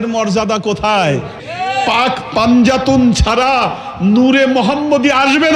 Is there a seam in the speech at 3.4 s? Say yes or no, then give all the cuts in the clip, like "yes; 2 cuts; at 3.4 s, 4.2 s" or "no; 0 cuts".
no; 1 cut; at 1.3 s